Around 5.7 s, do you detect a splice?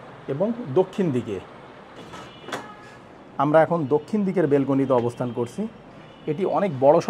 no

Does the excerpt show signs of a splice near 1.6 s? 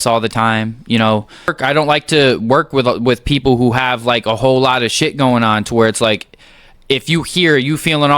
yes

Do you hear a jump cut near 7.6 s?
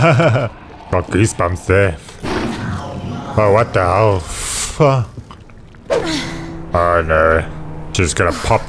no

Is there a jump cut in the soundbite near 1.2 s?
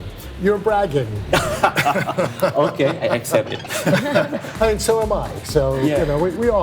no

